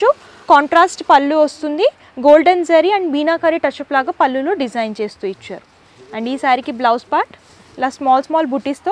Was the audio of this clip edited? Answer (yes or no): no